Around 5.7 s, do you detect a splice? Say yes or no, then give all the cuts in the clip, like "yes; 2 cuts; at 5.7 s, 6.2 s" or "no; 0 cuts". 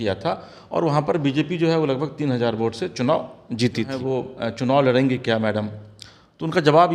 no; 1 cut; at 4.0 s